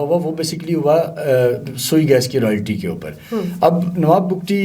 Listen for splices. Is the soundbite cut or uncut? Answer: uncut